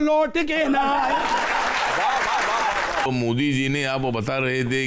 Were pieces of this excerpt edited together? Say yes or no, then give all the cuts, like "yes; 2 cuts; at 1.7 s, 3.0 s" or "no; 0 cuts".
yes; 1 cut; at 3.1 s